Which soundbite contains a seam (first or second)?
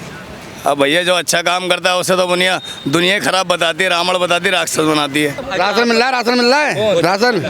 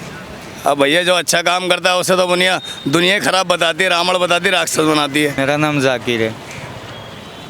first